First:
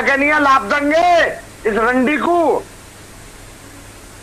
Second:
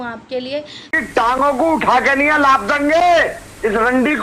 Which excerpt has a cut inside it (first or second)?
second